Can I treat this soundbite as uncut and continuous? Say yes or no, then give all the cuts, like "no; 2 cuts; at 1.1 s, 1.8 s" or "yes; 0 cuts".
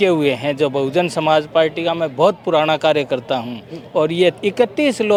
yes; 0 cuts